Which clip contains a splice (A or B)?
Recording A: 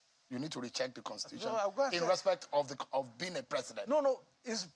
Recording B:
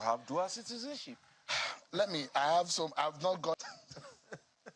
B